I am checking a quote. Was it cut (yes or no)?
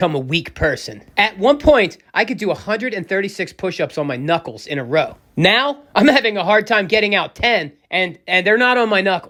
no